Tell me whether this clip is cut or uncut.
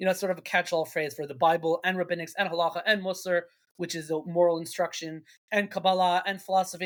uncut